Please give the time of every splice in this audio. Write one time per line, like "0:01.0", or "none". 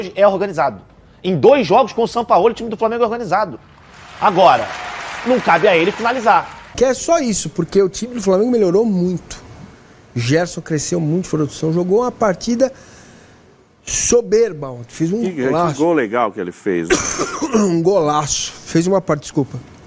0:06.8